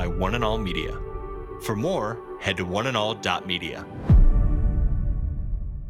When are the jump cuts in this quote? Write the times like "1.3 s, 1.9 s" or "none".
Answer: none